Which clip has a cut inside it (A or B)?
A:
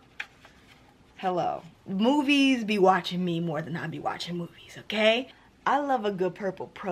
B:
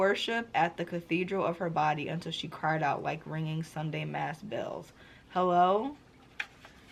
A